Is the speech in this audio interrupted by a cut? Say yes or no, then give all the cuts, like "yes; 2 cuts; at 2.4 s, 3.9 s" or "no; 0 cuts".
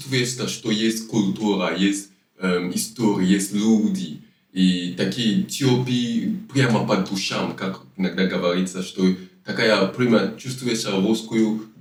no; 0 cuts